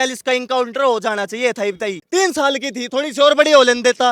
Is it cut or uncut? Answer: cut